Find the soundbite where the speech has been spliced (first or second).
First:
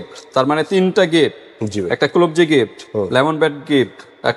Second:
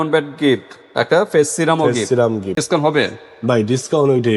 second